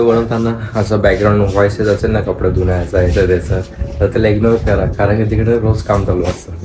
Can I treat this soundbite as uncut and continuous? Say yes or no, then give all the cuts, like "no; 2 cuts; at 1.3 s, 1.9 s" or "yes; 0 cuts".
yes; 0 cuts